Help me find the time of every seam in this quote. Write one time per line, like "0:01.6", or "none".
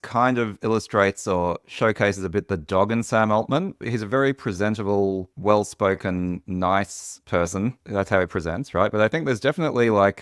0:03.8
0:06.4